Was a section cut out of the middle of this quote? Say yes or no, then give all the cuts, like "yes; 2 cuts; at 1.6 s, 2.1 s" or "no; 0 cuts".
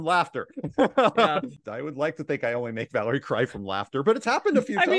yes; 1 cut; at 1.6 s